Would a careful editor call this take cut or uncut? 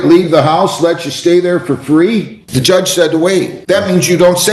cut